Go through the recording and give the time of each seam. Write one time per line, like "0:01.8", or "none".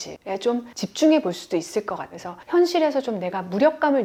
none